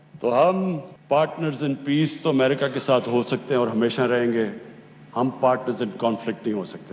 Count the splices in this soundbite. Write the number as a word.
one